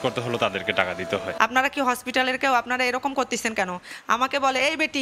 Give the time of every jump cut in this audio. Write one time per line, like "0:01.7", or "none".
0:01.3